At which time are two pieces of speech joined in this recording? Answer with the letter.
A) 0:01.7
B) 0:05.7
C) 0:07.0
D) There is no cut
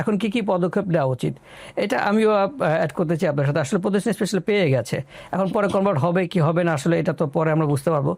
D